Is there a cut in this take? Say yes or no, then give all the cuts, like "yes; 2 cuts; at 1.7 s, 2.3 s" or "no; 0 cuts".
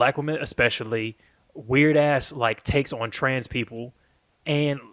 no; 0 cuts